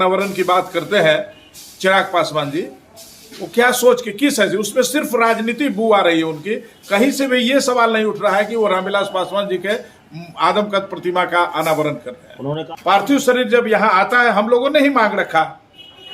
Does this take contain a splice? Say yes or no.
yes